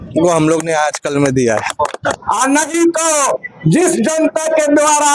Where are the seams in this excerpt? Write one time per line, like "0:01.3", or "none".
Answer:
0:02.2